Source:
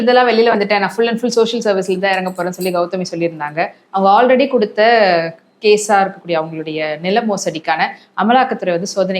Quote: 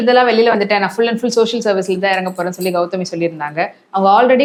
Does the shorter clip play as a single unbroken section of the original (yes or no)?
yes